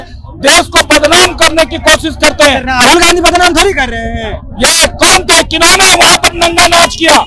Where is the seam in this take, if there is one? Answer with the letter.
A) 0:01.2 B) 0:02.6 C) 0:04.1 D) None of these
D